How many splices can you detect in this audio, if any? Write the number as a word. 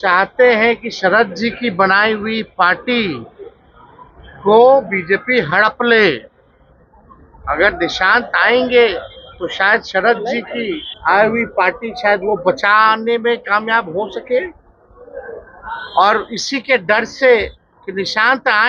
zero